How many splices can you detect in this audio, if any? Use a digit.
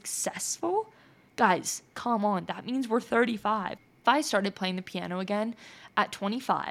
1